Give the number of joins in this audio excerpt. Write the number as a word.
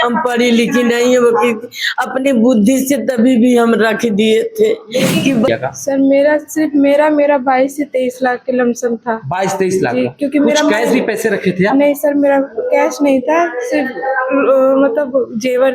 one